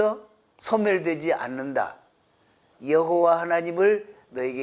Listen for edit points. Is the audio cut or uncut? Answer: cut